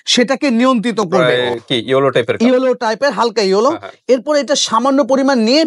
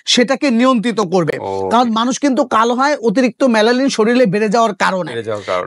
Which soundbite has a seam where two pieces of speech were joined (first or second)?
first